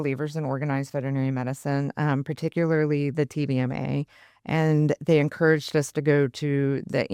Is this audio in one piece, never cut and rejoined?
yes; 0 cuts

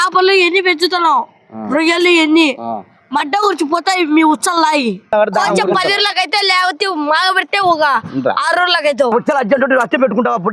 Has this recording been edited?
yes; 2 cuts; at 5.1 s, 9.1 s

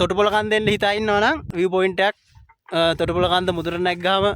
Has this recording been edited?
yes; 1 cut; at 1.5 s

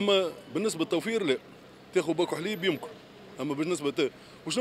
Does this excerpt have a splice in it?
no; 0 cuts

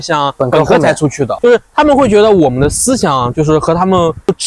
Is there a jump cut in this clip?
yes; 1 cut; at 1.3 s

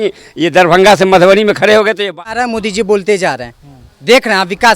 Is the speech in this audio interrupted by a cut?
yes; 1 cut; at 2.2 s

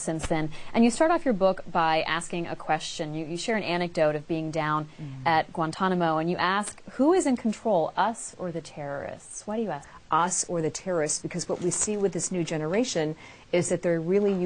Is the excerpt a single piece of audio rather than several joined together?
yes; 0 cuts

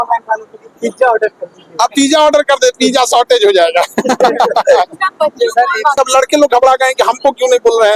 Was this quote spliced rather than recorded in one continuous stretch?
yes; 1 cut; at 6.0 s

